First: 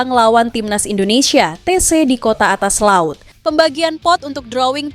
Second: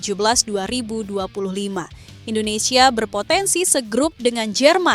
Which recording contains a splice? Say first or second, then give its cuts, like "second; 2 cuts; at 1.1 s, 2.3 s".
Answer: first; 1 cut; at 3.3 s